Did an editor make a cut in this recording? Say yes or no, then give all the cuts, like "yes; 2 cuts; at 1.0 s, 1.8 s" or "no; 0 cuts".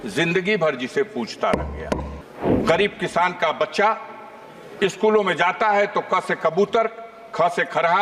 yes; 1 cut; at 2.1 s